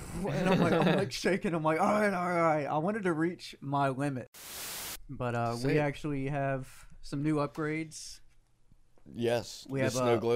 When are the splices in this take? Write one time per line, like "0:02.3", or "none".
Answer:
0:04.7